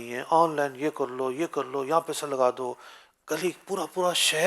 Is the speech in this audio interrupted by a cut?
no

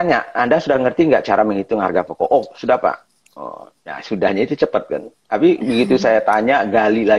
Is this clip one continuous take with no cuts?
yes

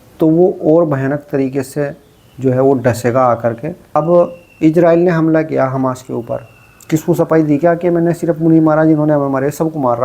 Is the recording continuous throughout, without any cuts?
no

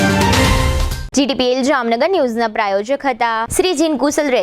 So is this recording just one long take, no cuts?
yes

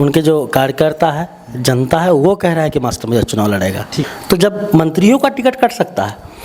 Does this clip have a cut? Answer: yes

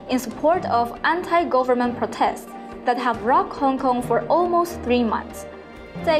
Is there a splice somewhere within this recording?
no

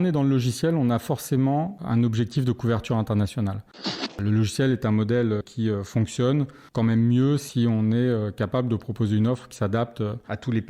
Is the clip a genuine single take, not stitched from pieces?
no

